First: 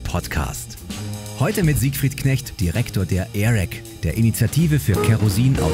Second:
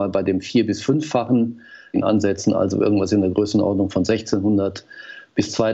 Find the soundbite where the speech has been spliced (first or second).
second